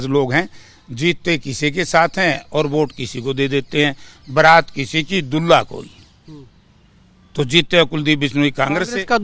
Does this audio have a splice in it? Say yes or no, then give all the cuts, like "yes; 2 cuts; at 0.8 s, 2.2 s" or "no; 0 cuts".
no; 0 cuts